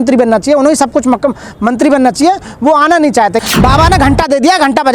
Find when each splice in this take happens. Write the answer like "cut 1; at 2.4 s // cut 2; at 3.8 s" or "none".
cut 1; at 3.4 s

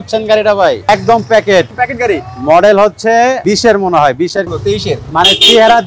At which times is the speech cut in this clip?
cut 1; at 0.9 s // cut 2; at 1.7 s // cut 3; at 3.4 s // cut 4; at 4.5 s

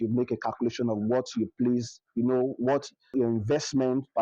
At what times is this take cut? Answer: cut 1; at 3.1 s

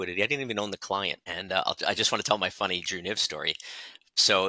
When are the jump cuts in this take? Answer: cut 1; at 1.3 s

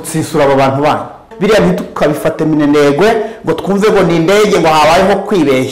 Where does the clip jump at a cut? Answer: cut 1; at 1.3 s

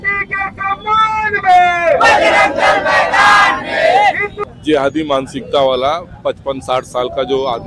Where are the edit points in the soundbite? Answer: cut 1; at 4.3 s

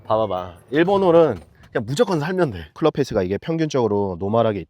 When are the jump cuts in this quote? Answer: cut 1; at 2.8 s

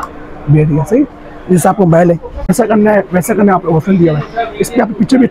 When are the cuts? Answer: cut 1; at 2.5 s

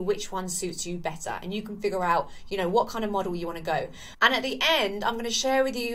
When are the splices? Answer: none

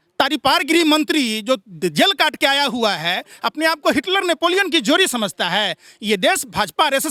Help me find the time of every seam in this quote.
none

